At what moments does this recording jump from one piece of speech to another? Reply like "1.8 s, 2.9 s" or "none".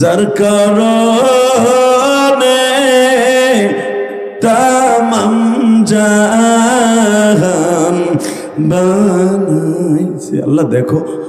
none